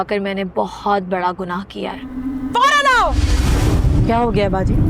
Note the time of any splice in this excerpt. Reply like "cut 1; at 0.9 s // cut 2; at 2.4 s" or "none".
cut 1; at 2.1 s